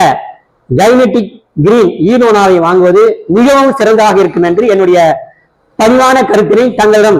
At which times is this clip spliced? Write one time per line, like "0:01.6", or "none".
none